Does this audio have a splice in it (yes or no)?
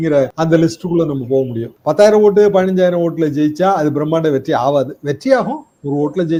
no